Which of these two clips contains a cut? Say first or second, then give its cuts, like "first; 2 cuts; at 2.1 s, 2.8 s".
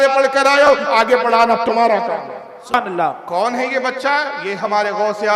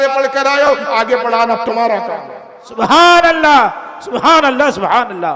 first; 1 cut; at 2.8 s